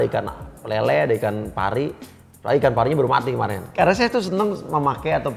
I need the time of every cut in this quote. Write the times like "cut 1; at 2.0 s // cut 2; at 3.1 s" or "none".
cut 1; at 3.6 s